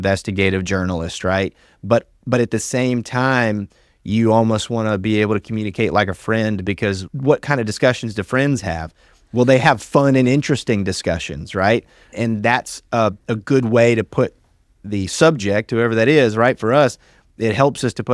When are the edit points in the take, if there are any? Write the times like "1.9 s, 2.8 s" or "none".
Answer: none